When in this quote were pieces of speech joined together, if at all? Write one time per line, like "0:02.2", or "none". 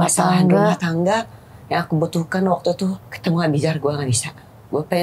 0:03.1